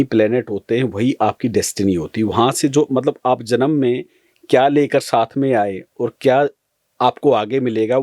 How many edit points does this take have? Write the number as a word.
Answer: zero